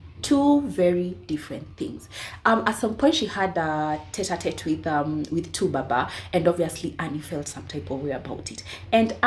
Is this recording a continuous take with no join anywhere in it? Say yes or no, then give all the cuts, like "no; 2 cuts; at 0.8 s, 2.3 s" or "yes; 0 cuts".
yes; 0 cuts